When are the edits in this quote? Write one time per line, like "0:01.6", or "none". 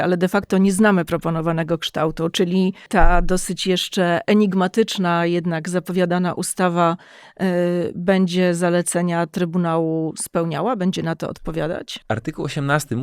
0:02.9
0:11.9